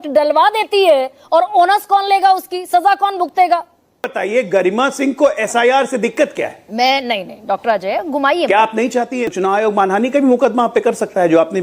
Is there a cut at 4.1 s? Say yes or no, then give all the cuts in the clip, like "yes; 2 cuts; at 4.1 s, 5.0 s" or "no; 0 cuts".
yes; 2 cuts; at 4.1 s, 9.2 s